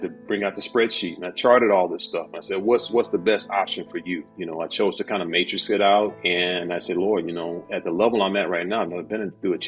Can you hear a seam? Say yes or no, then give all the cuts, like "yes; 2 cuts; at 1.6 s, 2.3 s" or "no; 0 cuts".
yes; 1 cut; at 4.3 s